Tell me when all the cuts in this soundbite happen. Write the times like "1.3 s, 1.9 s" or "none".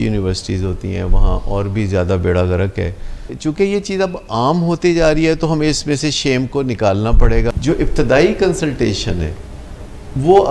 3.3 s, 7.5 s